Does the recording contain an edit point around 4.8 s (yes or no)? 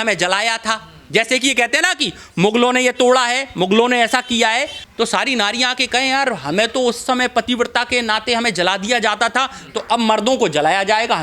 yes